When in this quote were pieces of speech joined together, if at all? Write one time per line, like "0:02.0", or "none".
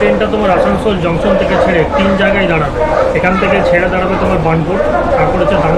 none